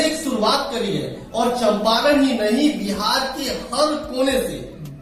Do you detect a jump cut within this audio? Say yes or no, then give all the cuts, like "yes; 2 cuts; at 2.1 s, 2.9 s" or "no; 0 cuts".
no; 0 cuts